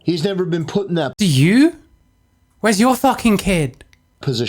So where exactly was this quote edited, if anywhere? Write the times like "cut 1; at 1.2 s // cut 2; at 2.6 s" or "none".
none

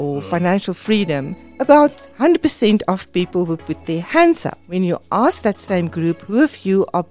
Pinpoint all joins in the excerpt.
cut 1; at 4.6 s

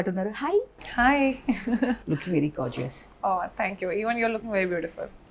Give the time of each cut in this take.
none

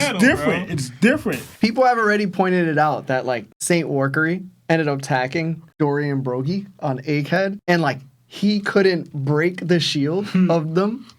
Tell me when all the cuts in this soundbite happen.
cut 1; at 1.5 s

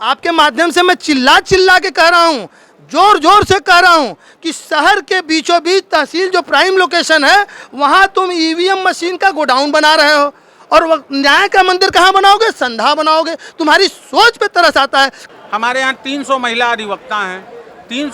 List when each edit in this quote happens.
cut 1; at 15.4 s

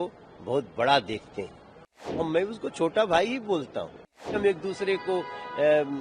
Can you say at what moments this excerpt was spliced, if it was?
cut 1; at 2.3 s // cut 2; at 4.3 s

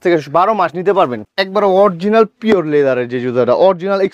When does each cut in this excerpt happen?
cut 1; at 1.2 s

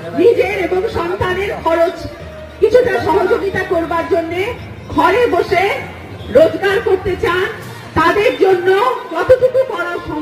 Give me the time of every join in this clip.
cut 1; at 9.2 s

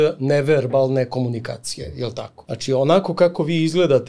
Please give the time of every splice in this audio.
cut 1; at 2.4 s

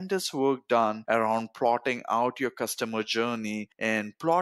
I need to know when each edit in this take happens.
none

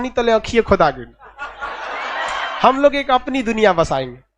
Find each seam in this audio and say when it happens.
cut 1; at 2.4 s

